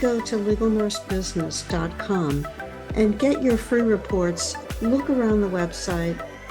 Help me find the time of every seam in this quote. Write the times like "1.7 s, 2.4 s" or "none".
none